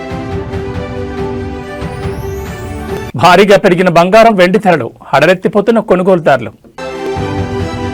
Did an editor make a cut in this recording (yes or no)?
yes